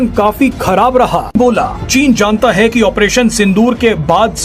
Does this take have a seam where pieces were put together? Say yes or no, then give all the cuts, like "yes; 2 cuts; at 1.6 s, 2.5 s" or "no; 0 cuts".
yes; 1 cut; at 1.4 s